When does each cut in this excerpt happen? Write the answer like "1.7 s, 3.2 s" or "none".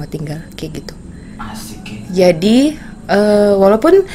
none